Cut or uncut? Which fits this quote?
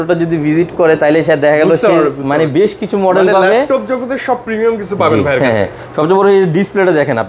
uncut